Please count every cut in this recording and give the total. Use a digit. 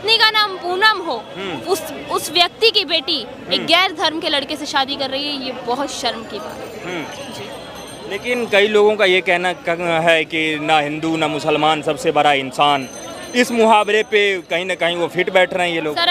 0